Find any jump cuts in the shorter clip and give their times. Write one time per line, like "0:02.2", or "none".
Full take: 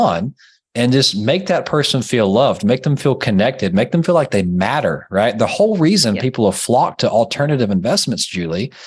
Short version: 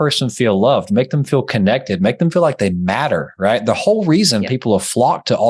none